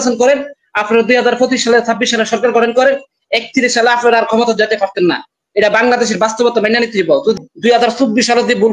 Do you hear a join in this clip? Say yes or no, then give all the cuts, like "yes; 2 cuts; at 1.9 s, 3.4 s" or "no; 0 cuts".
yes; 1 cut; at 7.4 s